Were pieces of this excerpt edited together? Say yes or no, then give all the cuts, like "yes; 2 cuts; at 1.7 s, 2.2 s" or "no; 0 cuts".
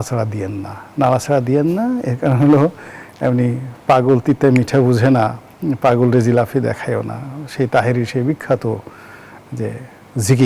no; 0 cuts